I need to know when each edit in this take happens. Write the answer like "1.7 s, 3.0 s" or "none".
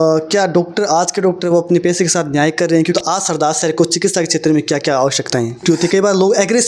2.9 s, 5.6 s

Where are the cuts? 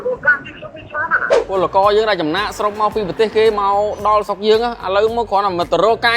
1.3 s

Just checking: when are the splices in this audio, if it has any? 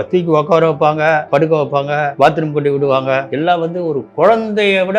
1.2 s, 2.1 s, 3.3 s

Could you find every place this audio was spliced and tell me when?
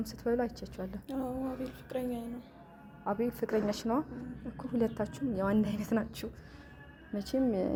none

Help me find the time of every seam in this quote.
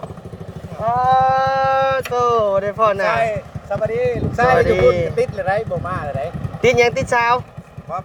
none

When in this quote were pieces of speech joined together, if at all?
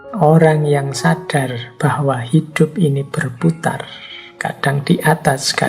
none

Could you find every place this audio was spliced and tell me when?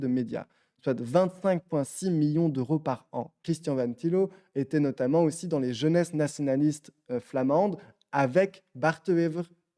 3.4 s

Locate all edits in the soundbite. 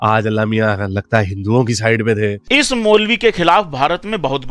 2.4 s

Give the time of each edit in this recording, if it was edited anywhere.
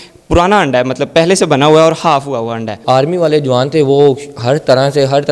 2.7 s

